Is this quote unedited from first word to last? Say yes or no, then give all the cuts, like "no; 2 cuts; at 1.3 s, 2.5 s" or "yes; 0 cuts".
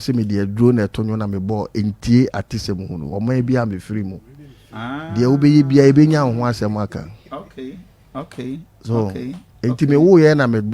yes; 0 cuts